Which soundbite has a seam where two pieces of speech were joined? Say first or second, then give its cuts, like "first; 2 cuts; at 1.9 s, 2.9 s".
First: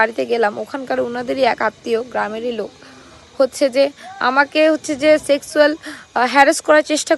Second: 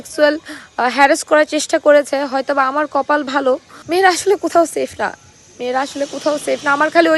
second; 1 cut; at 3.7 s